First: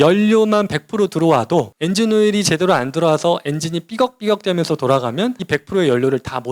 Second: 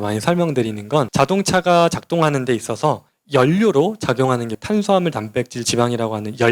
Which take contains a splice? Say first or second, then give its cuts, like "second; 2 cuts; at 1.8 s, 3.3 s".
second; 1 cut; at 1.1 s